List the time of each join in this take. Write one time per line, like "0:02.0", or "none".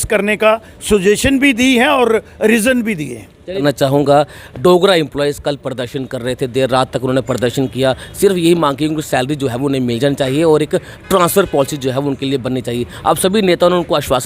0:03.6